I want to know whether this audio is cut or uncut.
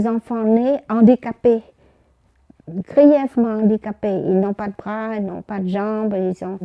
uncut